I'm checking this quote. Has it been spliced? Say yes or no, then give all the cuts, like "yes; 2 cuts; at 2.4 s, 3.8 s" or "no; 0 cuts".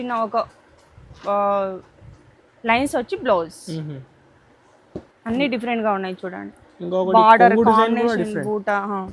yes; 1 cut; at 5.1 s